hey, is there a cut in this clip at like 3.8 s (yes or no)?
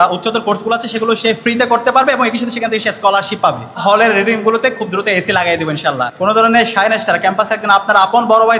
yes